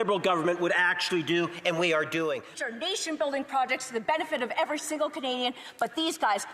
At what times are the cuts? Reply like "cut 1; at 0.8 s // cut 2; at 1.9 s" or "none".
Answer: cut 1; at 2.4 s